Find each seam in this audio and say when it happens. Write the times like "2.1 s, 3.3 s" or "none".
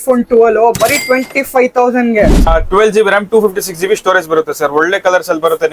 2.5 s